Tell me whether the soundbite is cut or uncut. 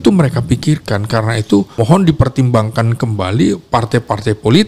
cut